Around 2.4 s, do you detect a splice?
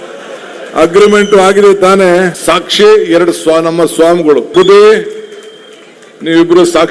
yes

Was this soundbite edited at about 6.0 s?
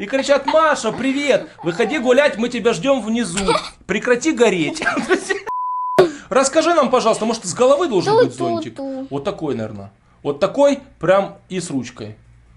yes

